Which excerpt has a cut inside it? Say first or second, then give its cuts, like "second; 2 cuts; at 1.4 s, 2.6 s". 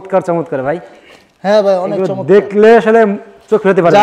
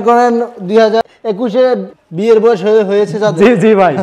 second; 2 cuts; at 1.0 s, 2.0 s